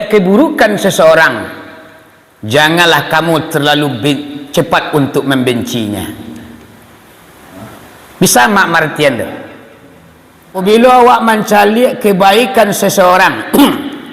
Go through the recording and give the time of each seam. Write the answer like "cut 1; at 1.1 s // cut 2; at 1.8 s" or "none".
cut 1; at 10.6 s